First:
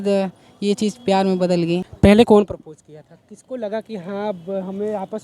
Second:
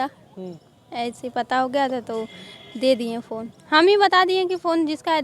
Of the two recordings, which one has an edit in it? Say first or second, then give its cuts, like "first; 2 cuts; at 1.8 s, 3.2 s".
first; 2 cuts; at 1.9 s, 3.3 s